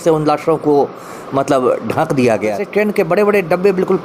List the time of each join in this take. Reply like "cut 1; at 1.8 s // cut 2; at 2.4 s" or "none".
cut 1; at 2.6 s